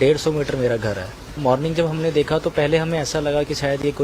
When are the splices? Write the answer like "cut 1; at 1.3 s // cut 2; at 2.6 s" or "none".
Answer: cut 1; at 1.4 s